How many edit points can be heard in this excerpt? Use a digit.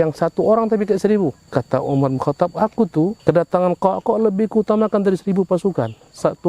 2